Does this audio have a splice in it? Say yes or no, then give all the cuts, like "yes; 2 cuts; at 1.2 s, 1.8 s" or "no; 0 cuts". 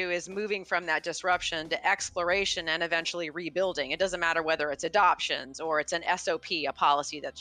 no; 0 cuts